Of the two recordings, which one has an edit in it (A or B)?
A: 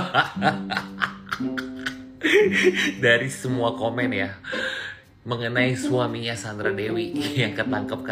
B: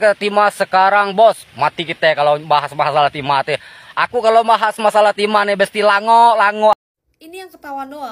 B